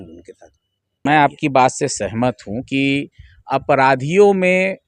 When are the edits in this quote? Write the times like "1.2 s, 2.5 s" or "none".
0.9 s